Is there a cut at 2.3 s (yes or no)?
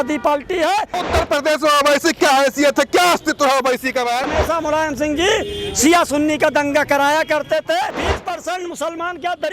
no